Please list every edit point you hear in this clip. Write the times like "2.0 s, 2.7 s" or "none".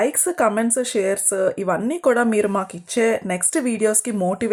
none